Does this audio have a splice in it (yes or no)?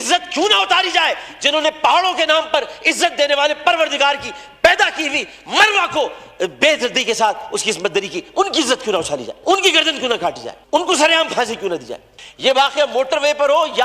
yes